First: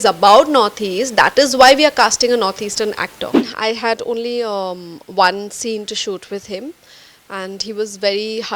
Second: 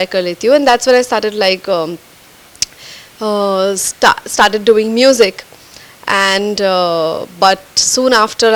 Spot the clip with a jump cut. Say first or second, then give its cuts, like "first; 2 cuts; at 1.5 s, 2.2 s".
first; 1 cut; at 3.5 s